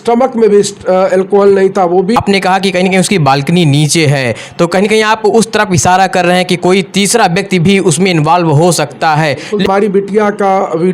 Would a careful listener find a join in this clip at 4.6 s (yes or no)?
no